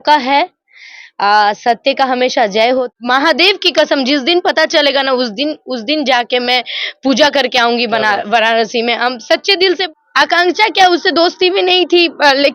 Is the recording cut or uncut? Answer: cut